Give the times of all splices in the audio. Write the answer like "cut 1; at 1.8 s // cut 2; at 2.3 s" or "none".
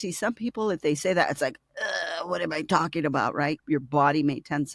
cut 1; at 3.6 s